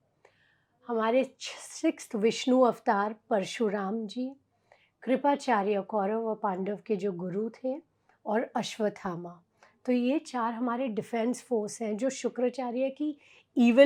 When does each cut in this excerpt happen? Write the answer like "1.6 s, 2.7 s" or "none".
none